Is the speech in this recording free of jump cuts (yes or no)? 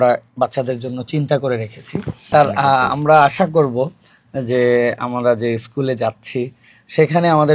no